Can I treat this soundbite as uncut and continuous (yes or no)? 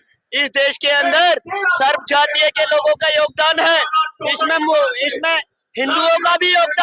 yes